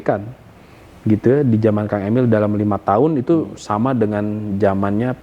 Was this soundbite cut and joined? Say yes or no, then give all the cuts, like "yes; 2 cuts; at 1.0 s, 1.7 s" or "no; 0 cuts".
no; 0 cuts